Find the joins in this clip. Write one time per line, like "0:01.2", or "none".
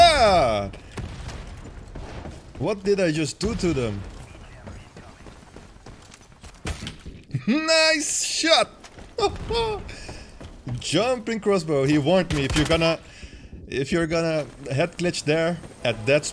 0:04.2